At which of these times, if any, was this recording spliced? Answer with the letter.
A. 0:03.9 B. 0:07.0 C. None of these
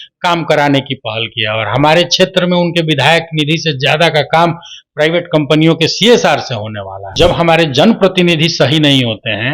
B